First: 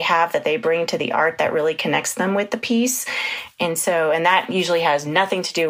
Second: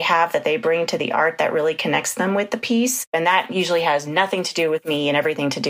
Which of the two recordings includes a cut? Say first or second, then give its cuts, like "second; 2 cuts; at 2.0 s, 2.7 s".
second; 1 cut; at 3.1 s